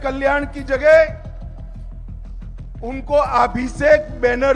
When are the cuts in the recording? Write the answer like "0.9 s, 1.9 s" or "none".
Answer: none